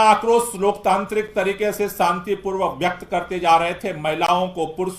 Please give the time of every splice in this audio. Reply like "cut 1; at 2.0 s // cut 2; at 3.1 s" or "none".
none